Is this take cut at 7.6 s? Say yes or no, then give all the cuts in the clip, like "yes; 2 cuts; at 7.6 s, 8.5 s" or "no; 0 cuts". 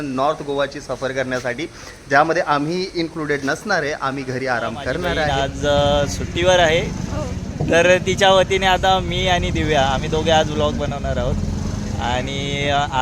no; 1 cut; at 5.3 s